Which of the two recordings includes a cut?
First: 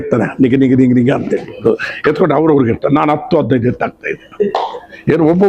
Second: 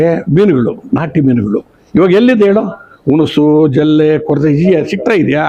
first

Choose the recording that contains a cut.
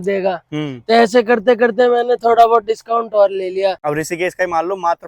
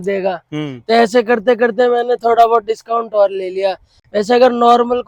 first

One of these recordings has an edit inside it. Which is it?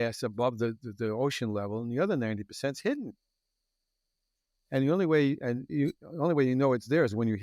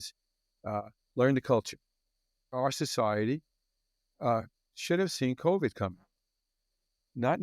second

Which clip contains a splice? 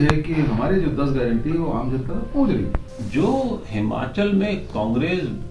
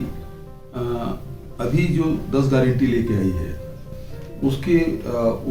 first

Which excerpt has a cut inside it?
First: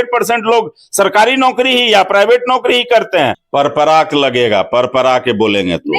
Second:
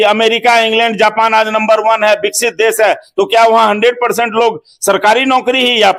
first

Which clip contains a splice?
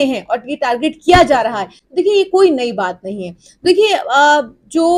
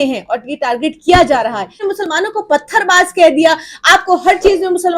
second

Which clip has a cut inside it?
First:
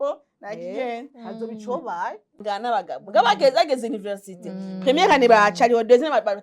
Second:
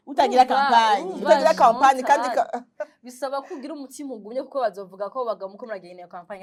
first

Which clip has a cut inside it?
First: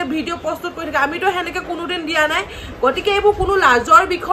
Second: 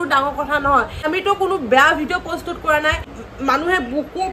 second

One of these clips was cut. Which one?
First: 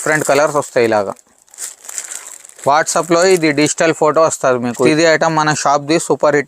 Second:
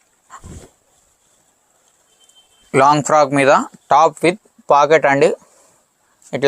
first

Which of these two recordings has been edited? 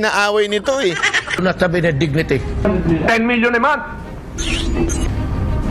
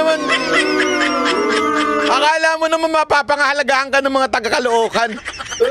first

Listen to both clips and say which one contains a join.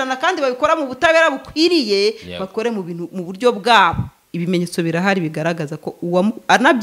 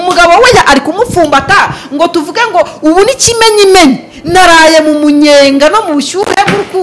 first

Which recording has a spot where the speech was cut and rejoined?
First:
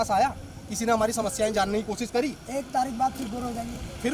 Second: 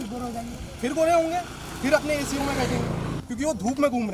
second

